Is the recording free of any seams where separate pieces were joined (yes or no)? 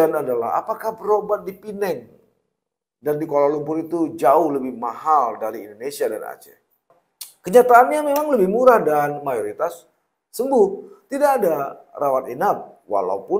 yes